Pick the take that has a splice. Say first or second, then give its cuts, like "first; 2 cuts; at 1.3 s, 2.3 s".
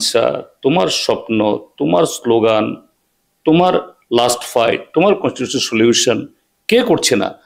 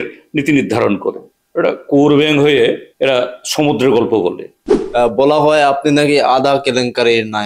second; 3 cuts; at 1.3 s, 2.9 s, 4.7 s